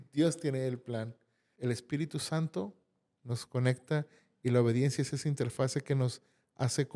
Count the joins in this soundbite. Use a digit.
1